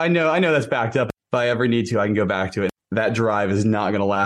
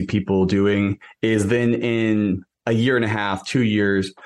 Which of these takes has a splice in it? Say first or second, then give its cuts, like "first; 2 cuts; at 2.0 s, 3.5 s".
first; 2 cuts; at 1.1 s, 2.7 s